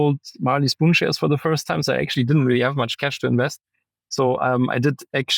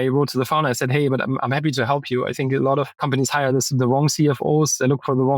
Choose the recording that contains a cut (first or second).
second